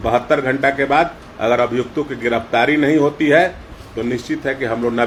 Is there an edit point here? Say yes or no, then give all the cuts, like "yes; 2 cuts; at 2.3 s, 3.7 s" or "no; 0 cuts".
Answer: no; 0 cuts